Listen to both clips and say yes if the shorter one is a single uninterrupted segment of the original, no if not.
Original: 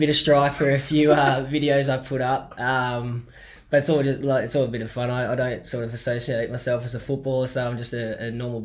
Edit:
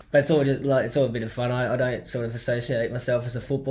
yes